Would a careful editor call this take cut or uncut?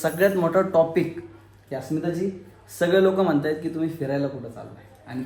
uncut